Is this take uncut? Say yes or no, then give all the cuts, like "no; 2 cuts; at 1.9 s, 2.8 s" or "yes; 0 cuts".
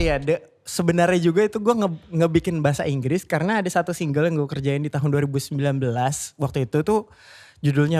yes; 0 cuts